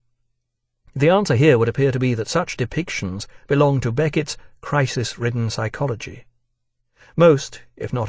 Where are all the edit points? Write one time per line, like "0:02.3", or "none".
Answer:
none